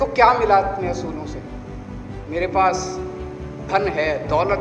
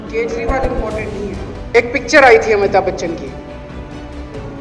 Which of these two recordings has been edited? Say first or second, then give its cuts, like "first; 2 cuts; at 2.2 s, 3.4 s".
second; 1 cut; at 1.6 s